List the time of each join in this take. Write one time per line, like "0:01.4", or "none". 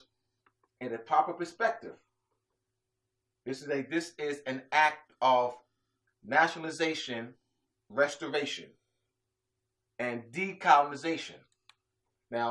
0:07.0